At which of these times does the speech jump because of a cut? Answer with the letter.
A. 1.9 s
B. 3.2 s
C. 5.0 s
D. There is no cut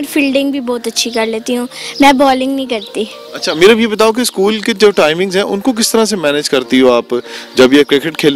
D